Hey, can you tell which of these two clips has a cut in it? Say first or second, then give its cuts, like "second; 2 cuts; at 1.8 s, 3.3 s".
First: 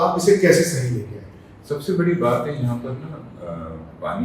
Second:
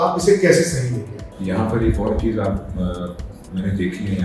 second; 1 cut; at 1.3 s